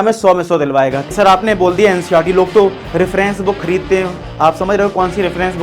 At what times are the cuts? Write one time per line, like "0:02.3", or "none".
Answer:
0:01.1

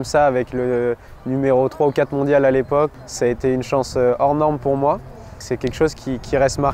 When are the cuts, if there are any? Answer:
0:02.9
0:05.4

